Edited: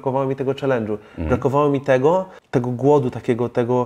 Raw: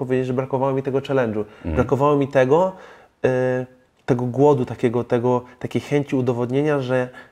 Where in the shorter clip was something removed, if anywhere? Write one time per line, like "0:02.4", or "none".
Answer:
0:02.4